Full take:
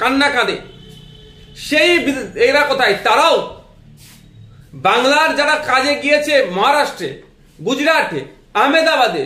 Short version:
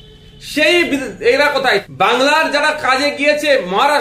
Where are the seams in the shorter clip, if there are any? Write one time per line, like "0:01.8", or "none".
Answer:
0:01.8